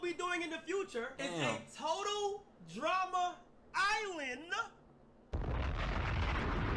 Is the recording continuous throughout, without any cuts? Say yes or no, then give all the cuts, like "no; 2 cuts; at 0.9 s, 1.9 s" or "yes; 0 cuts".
no; 1 cut; at 1.1 s